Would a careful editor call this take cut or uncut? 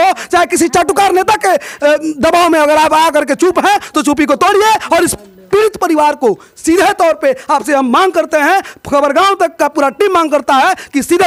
uncut